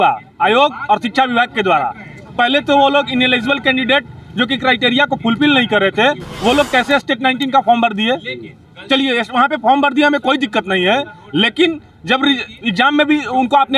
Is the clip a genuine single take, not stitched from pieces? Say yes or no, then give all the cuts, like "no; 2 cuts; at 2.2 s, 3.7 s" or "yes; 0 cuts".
yes; 0 cuts